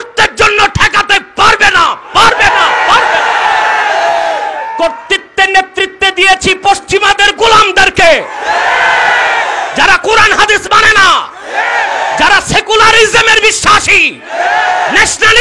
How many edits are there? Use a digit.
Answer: 1